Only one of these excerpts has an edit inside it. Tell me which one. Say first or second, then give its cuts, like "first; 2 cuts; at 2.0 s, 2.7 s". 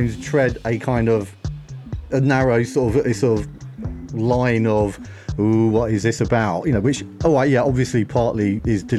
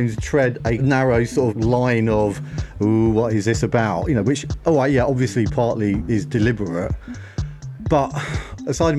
second; 2 cuts; at 0.8 s, 1.5 s